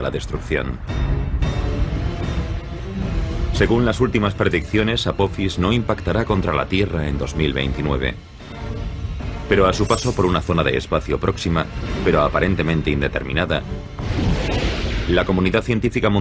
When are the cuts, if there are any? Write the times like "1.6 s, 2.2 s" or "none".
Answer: 5.3 s